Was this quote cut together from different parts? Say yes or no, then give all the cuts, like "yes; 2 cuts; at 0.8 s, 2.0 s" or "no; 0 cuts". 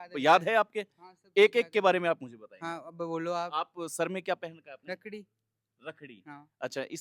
no; 0 cuts